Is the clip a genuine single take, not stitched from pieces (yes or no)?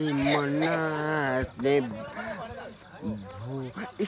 yes